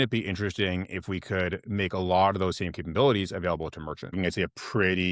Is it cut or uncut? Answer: cut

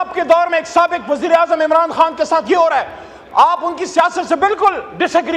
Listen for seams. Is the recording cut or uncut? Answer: uncut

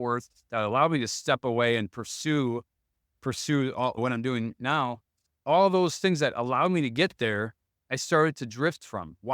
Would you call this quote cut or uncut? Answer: cut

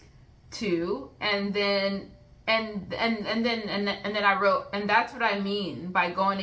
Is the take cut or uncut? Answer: uncut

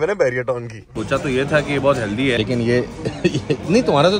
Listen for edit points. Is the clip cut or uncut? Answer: cut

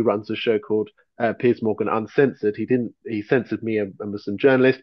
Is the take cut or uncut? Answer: uncut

